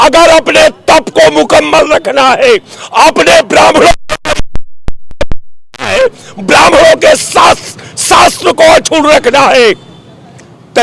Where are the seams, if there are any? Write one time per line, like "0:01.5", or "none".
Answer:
none